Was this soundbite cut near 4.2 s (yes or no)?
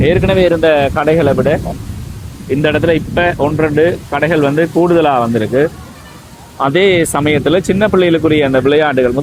no